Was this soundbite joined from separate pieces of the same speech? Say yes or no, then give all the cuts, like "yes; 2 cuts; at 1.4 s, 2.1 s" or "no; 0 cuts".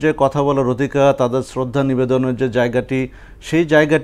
no; 0 cuts